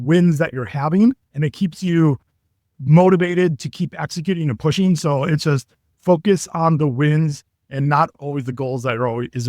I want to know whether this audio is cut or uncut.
cut